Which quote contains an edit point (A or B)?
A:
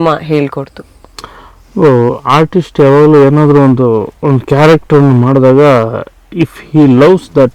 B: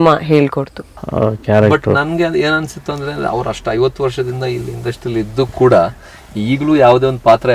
B